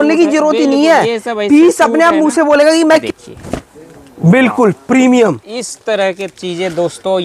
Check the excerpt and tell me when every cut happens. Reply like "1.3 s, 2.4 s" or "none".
3.0 s